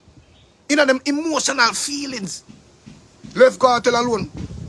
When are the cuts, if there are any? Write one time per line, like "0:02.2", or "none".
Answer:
none